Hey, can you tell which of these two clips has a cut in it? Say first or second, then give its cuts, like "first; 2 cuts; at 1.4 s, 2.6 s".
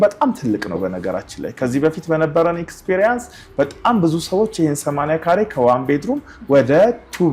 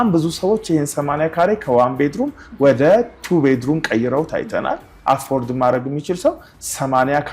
second; 1 cut; at 4.9 s